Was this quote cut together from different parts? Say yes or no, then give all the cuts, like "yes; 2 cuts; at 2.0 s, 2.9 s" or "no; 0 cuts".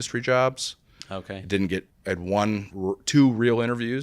yes; 1 cut; at 1.9 s